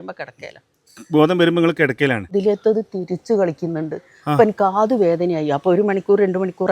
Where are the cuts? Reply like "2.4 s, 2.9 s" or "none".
2.3 s

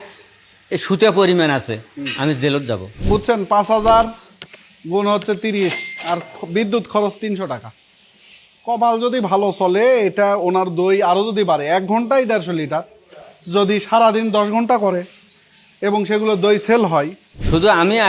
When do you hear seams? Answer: 2.9 s

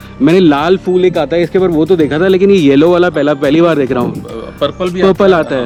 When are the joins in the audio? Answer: none

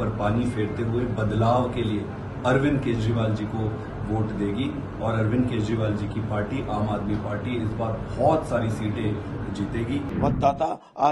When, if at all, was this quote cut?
10.1 s

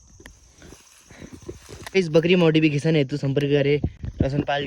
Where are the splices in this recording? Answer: 1.9 s

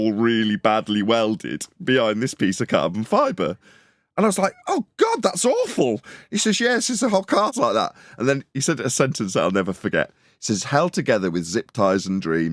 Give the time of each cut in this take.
7.5 s

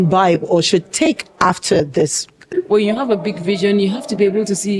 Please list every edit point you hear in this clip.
2.4 s

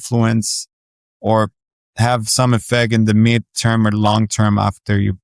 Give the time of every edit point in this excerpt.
none

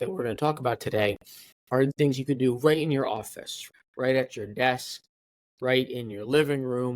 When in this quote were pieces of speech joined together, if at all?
1.9 s, 3.6 s

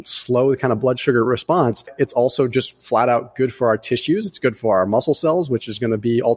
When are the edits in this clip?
1.9 s

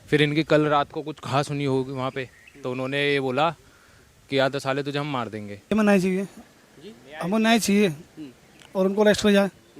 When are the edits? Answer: 5.7 s

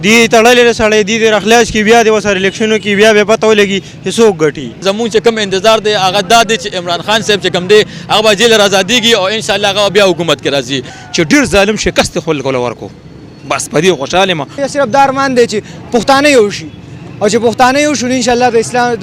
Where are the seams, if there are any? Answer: 4.8 s, 10.9 s, 14.6 s

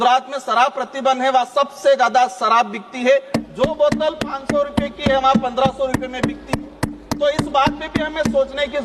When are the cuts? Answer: none

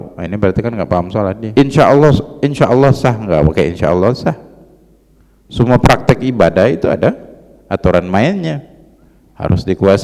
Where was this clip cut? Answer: 1.4 s

